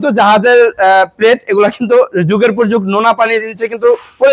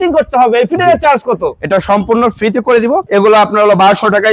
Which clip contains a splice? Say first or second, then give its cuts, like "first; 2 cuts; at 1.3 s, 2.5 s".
second; 1 cut; at 3.1 s